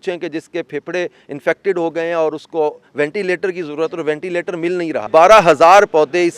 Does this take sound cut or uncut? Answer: cut